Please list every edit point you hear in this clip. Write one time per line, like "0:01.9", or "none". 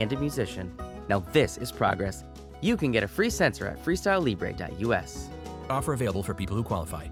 none

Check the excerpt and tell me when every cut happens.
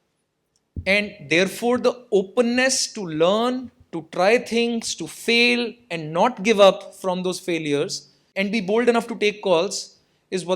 0:08.3

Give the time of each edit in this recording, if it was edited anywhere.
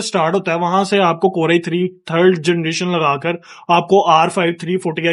none

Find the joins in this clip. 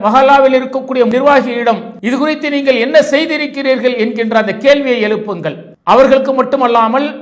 0:01.1
0:01.9

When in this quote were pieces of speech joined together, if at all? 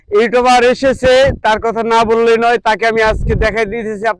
none

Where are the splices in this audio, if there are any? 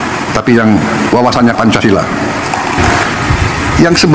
0:02.8

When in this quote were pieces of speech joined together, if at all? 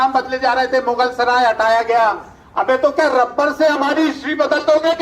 none

